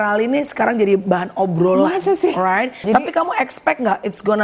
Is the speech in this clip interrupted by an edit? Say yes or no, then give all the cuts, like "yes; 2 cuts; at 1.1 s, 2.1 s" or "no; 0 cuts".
yes; 1 cut; at 2.8 s